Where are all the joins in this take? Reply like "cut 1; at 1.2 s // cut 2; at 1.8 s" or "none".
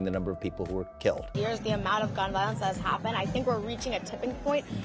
cut 1; at 1.3 s